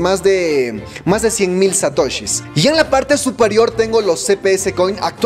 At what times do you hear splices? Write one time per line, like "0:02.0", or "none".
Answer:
0:02.4

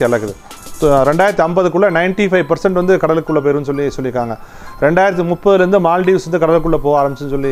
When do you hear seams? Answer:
none

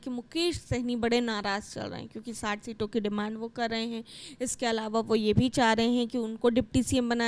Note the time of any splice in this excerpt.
none

